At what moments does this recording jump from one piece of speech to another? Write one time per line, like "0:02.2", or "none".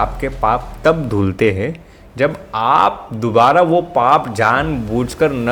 none